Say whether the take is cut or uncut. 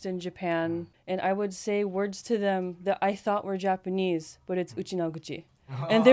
cut